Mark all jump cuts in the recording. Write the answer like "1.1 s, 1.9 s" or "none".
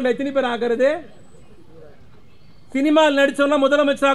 none